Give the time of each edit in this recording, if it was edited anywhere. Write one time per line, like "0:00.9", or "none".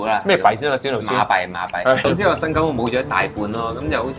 0:02.0